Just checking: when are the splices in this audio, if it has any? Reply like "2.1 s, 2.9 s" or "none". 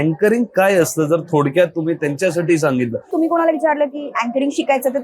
3.0 s

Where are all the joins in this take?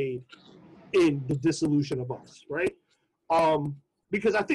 none

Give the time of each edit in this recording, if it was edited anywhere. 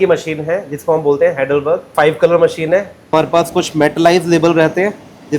1.9 s, 3.1 s

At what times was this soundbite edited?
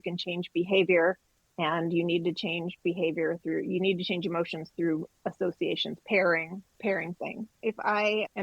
7.5 s

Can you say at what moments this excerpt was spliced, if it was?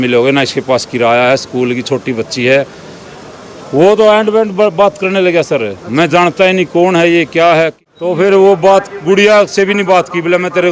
7.8 s

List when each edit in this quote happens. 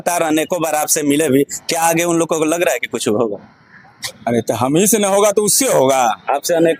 none

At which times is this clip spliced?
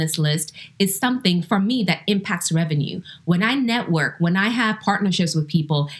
none

